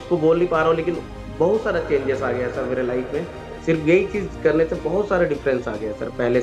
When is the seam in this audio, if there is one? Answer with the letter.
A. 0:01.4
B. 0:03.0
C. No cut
C